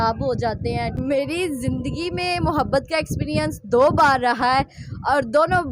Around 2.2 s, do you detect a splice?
no; 1 cut; at 1.0 s

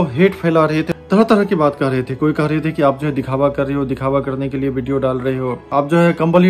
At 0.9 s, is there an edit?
no; 0 cuts

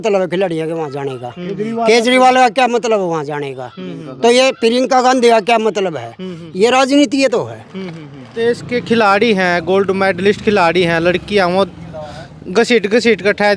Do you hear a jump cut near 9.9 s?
no; 1 cut; at 8.3 s

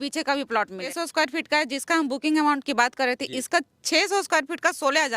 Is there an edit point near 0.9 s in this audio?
yes; 1 cut; at 0.9 s

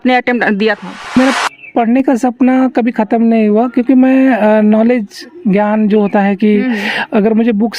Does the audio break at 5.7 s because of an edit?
no; 1 cut; at 1.1 s

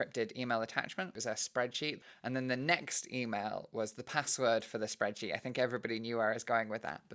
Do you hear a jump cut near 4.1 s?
no; 2 cuts; at 1.2 s, 2.0 s

